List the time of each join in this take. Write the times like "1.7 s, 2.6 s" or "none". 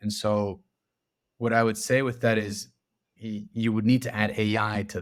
none